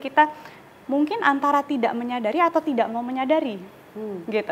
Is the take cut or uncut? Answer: uncut